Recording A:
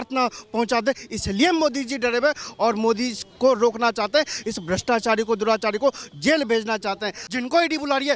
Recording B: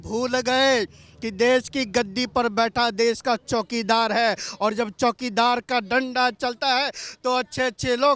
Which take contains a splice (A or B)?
A